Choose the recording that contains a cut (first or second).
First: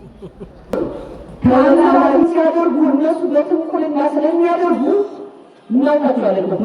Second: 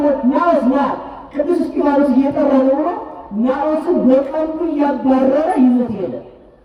first